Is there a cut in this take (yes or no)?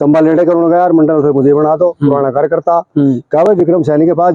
no